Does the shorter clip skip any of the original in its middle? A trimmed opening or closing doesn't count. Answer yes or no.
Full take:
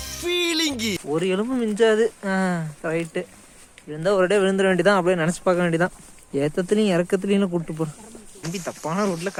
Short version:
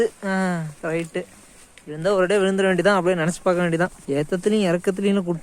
yes